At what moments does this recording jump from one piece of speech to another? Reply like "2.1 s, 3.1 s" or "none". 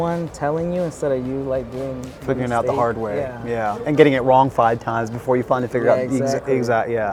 none